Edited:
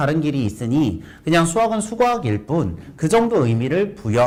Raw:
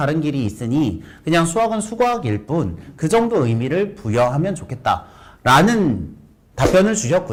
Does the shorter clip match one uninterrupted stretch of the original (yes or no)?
yes